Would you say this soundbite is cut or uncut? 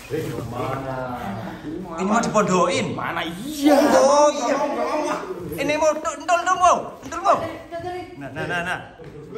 uncut